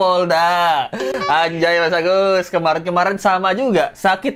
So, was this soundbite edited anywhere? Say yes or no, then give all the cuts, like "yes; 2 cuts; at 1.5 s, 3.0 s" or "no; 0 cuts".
no; 0 cuts